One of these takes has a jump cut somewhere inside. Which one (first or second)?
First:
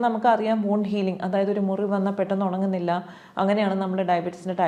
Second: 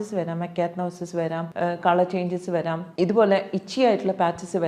second